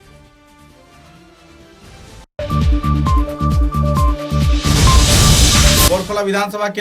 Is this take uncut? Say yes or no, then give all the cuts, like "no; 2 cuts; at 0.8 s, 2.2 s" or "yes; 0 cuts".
no; 2 cuts; at 2.2 s, 5.9 s